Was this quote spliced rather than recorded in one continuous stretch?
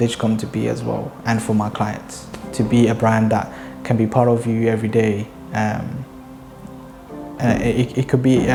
no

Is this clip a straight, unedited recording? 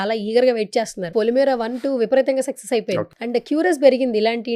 no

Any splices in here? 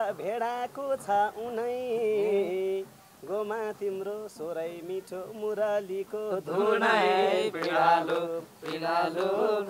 no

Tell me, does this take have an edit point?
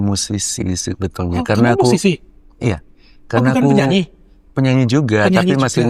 no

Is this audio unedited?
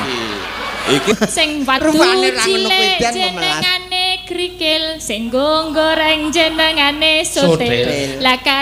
no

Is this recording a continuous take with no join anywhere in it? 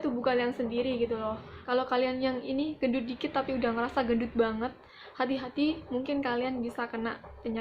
no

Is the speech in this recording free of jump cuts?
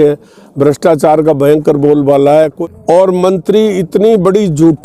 no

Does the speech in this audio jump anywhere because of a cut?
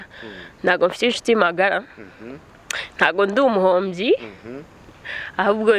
no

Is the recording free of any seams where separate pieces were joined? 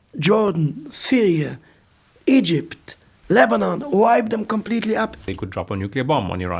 no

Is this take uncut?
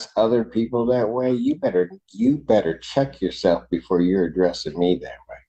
yes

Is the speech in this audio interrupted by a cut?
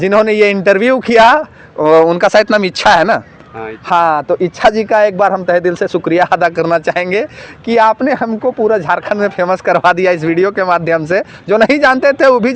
no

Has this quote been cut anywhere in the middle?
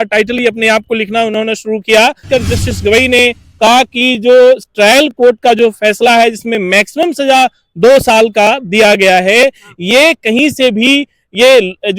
yes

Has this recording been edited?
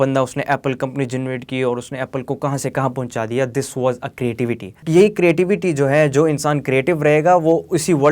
yes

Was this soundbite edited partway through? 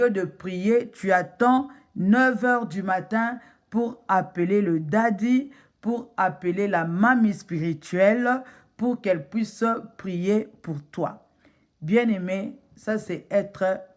no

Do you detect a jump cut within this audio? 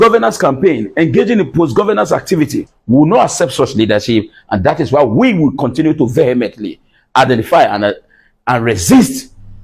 yes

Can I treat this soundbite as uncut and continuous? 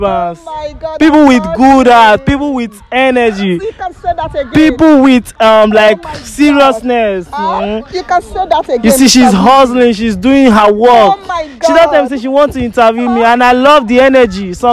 yes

